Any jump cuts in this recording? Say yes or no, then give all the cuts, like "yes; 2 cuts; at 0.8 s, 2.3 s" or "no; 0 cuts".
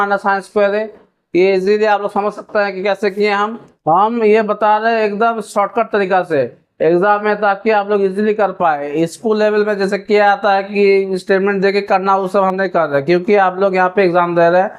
no; 0 cuts